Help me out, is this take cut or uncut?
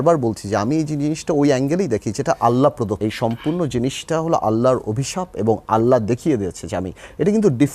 cut